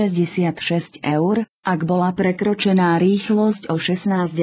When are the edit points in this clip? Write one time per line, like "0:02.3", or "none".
0:01.0
0:03.6